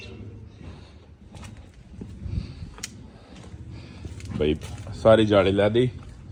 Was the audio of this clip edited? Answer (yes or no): no